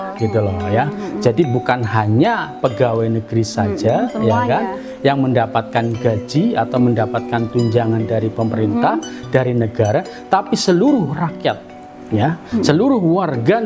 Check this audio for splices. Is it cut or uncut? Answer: uncut